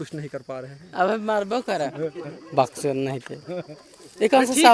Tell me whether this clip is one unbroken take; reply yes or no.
yes